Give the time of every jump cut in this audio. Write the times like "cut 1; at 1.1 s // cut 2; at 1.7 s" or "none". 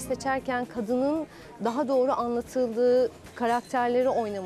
none

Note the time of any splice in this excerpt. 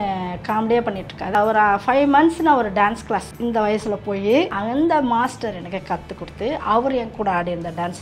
cut 1; at 1.3 s // cut 2; at 3.3 s // cut 3; at 4.5 s

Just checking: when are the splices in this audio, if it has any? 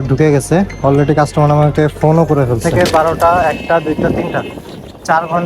cut 1; at 2.7 s

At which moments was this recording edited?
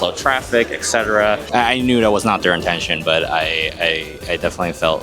cut 1; at 1.5 s

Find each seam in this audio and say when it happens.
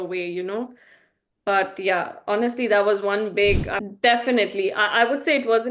cut 1; at 3.7 s

